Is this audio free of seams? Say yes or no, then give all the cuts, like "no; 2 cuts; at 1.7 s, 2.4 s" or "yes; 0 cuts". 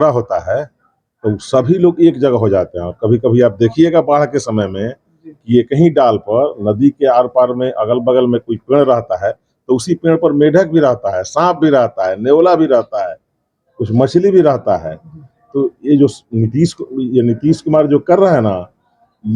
yes; 0 cuts